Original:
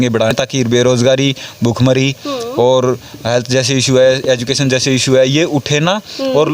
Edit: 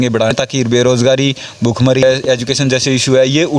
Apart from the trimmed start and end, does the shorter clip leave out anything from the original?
yes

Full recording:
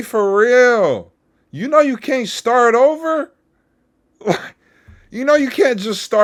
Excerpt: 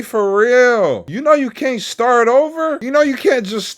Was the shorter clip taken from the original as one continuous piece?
no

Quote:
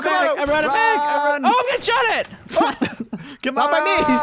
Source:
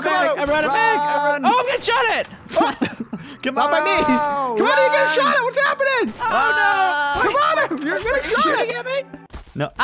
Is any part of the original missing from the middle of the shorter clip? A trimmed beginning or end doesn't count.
no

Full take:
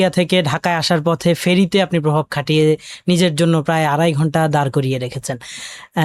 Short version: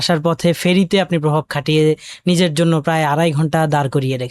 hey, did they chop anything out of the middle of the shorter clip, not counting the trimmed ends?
no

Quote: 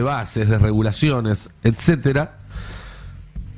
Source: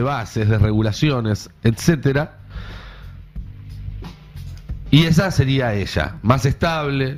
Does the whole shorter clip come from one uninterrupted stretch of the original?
yes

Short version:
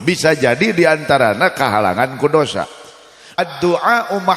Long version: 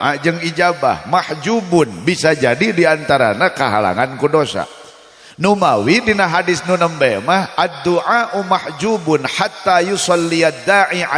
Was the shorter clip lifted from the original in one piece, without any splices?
no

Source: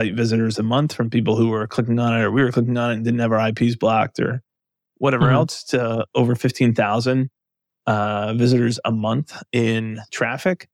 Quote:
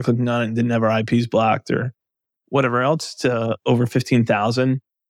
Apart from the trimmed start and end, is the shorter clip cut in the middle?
no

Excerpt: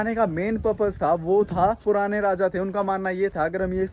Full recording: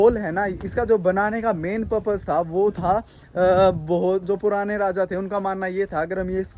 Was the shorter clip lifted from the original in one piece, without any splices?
no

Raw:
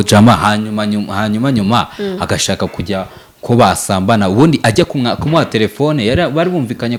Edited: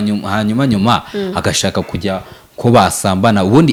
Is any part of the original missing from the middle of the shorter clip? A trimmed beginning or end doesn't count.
no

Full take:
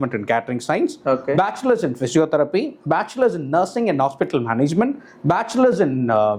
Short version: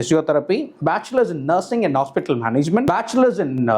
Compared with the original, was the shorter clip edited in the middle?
yes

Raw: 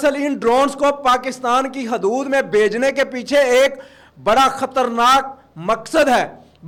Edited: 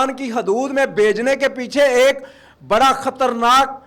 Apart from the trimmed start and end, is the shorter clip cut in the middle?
no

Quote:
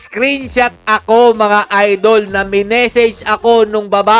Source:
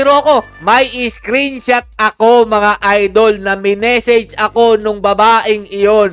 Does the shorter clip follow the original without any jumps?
yes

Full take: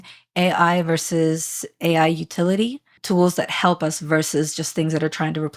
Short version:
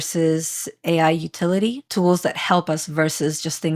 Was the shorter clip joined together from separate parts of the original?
yes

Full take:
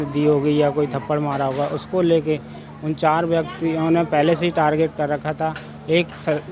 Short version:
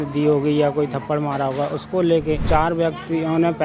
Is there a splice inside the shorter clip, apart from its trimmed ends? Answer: yes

